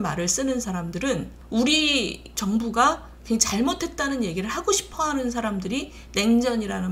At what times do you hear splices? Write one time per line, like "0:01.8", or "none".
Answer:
0:01.4
0:02.3